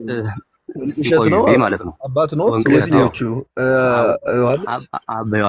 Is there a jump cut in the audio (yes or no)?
yes